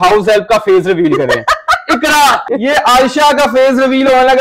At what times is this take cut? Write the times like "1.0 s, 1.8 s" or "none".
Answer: 2.5 s